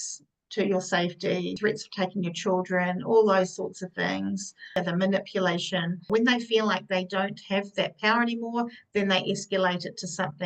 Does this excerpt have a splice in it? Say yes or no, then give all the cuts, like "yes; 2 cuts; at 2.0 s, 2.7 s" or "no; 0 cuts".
yes; 3 cuts; at 1.6 s, 4.8 s, 6.1 s